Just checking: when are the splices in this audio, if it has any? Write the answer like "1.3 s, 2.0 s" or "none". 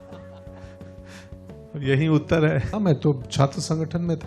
2.7 s